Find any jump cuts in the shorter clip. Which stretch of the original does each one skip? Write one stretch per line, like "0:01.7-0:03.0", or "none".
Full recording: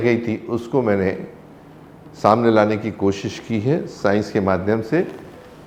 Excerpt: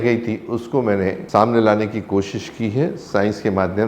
0:01.2-0:02.1

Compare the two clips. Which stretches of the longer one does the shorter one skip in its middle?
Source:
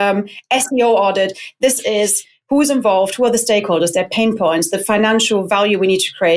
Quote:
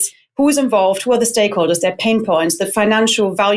none

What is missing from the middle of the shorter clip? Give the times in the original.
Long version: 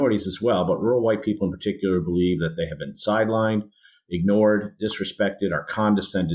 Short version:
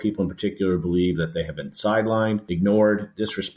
0:03.7-0:04.1

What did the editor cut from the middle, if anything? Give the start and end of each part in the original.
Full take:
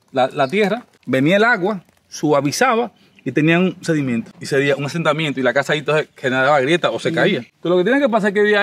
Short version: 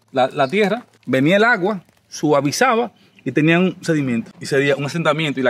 none

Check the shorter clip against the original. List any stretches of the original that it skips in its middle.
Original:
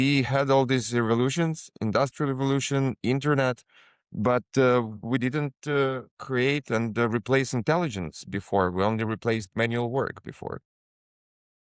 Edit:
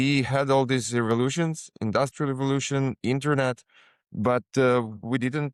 none

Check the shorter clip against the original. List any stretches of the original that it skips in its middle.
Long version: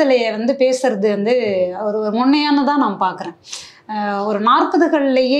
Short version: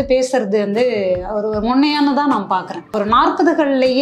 0:03.4-0:04.2

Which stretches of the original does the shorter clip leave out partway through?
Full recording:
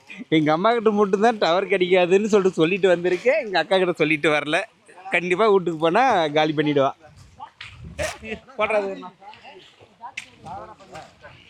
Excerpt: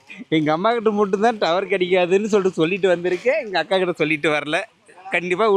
none

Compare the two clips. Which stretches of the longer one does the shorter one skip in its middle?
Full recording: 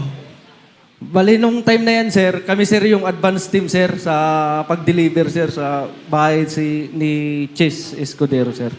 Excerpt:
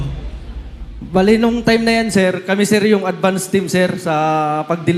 none

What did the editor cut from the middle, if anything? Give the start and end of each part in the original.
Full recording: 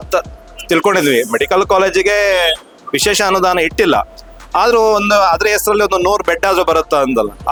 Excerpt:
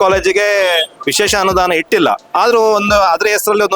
0:02.7-0:02.8
0:04.1-0:04.4

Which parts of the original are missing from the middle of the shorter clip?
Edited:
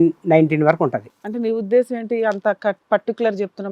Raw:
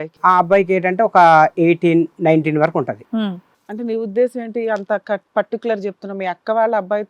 0:03.0-0:03.5

